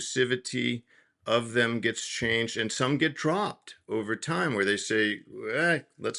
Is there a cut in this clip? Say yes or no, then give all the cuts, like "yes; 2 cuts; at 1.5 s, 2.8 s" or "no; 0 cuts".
no; 0 cuts